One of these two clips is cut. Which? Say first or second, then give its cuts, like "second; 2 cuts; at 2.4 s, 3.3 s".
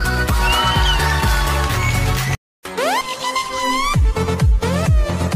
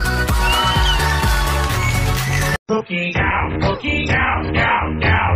second; 1 cut; at 2.3 s